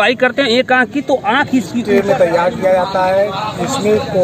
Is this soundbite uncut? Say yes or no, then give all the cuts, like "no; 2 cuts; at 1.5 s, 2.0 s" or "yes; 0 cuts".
no; 1 cut; at 1.8 s